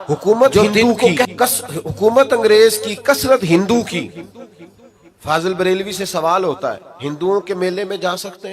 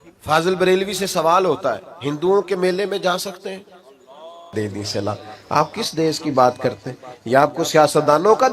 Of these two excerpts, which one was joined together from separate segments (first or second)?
second